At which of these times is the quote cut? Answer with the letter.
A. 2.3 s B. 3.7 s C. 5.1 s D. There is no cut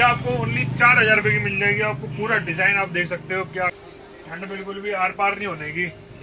B